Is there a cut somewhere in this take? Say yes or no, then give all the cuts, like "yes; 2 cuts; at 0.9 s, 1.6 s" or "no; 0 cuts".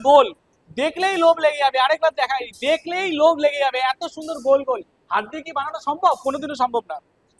no; 0 cuts